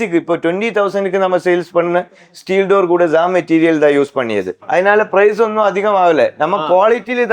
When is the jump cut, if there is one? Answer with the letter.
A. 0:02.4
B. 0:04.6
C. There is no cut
B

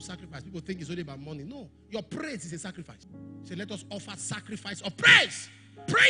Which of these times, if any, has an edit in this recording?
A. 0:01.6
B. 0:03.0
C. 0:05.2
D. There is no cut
B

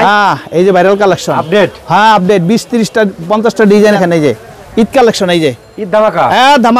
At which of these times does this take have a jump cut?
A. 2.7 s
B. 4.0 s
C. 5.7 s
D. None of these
B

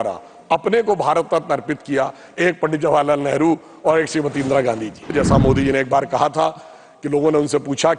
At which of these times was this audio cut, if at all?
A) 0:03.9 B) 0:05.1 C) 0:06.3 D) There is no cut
B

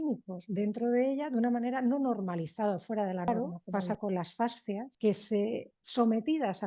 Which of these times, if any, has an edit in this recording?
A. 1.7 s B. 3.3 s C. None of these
B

